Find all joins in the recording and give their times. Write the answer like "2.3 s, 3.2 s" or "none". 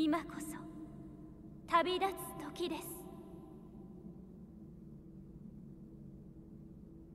3.0 s, 5.9 s